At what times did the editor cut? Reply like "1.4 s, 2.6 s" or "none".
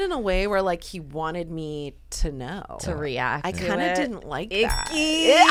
none

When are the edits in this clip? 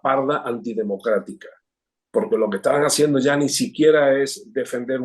none

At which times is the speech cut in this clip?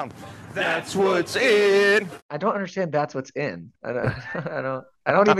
2.3 s

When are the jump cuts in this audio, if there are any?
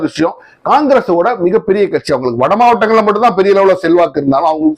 none

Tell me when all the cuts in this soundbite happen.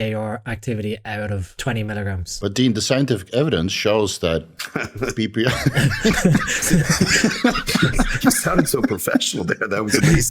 1.5 s

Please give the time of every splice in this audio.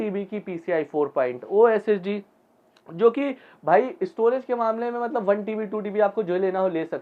none

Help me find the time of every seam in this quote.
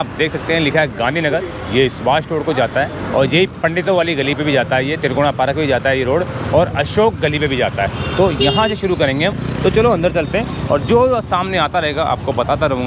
none

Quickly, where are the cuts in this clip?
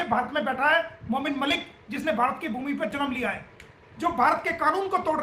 3.8 s

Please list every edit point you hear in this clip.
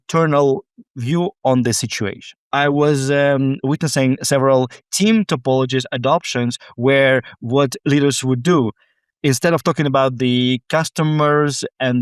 2.4 s

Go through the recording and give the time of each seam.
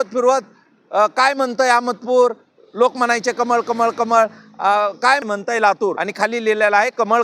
5.2 s, 6.0 s

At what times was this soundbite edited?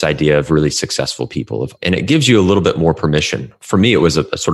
1.7 s, 3.5 s

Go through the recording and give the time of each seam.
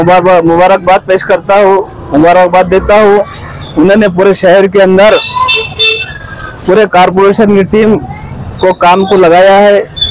none

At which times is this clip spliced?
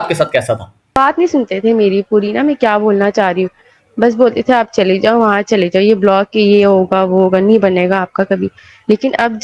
1.0 s

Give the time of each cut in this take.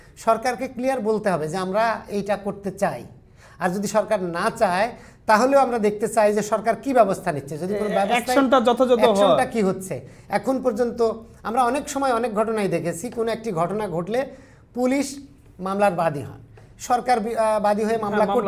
none

